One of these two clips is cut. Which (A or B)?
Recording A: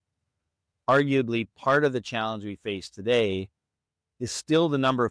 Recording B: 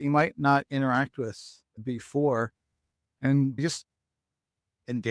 B